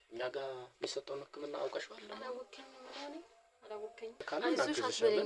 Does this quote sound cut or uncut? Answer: cut